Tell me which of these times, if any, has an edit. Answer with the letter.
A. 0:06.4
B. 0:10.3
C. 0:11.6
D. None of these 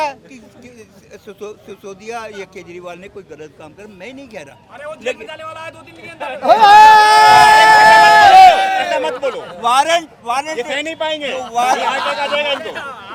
D